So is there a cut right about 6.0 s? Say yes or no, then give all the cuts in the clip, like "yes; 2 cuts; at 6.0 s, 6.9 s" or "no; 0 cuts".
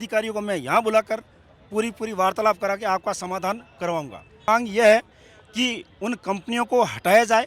no; 1 cut; at 4.5 s